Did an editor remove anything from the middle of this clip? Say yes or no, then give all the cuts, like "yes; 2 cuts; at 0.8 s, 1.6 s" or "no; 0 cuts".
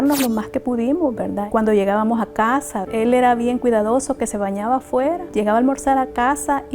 no; 0 cuts